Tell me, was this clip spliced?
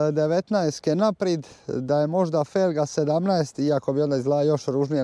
no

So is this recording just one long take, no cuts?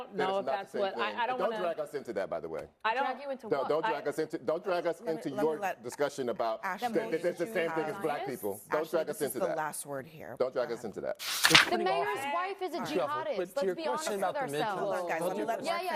no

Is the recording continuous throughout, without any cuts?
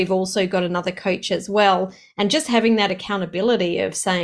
yes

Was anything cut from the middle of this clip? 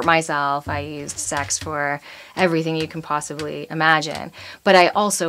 no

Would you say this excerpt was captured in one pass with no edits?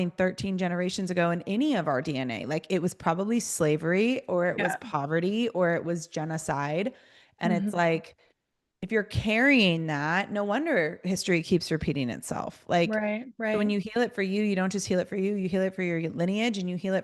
yes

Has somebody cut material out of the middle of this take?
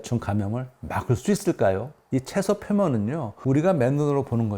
yes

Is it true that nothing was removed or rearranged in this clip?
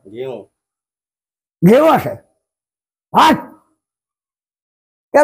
yes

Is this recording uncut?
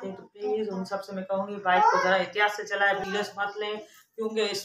no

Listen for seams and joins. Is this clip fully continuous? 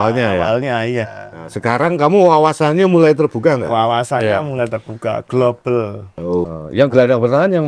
no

